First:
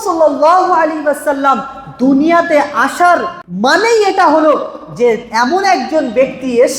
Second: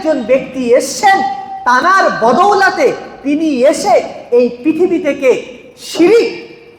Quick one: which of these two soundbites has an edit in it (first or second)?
first